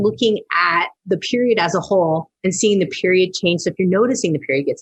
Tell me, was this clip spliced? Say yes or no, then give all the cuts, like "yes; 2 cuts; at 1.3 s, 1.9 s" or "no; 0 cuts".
no; 0 cuts